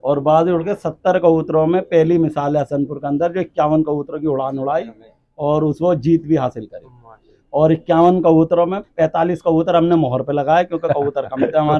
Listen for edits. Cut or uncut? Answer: uncut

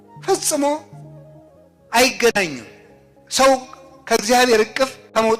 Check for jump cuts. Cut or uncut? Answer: uncut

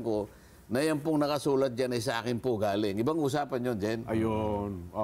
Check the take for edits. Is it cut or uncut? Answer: uncut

